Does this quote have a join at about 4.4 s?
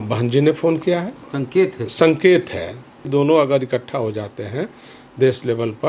no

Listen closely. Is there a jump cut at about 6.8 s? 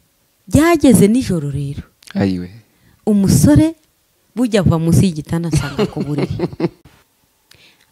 yes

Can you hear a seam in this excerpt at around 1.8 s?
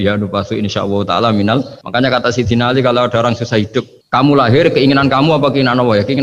yes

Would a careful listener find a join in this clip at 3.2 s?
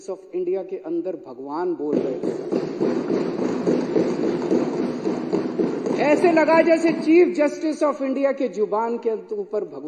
no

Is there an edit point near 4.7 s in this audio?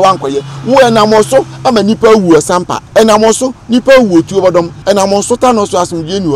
yes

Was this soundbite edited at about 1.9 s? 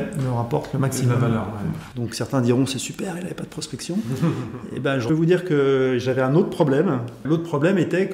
yes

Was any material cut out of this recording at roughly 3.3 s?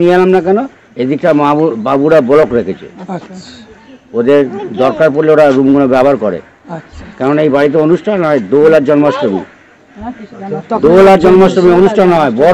no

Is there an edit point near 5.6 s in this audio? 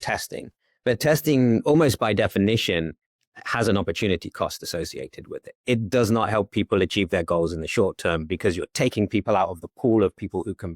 yes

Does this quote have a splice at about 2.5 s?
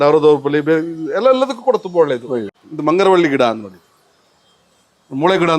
yes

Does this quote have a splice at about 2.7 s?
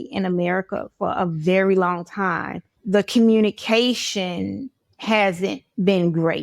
yes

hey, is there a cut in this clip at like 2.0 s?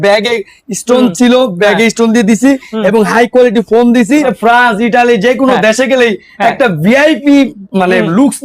no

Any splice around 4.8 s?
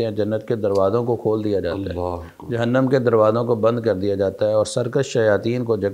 no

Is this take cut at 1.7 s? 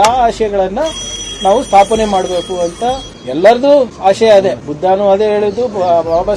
no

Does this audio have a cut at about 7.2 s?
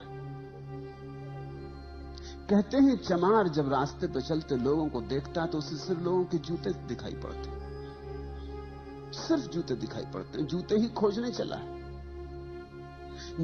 yes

